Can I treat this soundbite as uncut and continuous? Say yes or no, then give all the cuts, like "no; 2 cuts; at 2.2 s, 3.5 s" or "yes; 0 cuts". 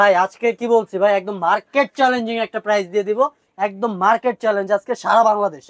yes; 0 cuts